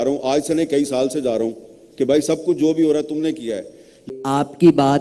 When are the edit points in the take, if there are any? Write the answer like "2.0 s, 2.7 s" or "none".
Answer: 4.0 s

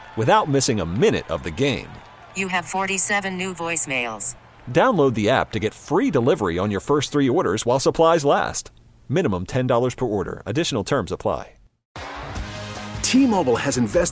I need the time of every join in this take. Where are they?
11.8 s

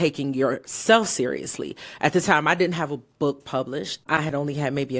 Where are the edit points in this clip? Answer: 4.1 s

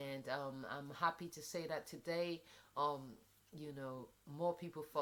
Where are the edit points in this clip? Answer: none

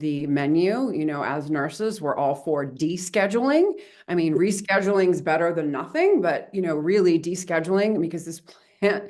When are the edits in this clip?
none

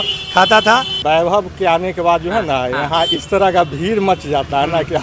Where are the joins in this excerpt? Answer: 0.9 s

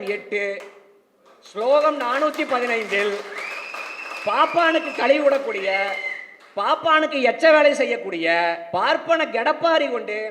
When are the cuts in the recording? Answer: 8.6 s

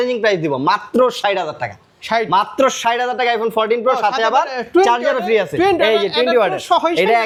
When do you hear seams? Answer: none

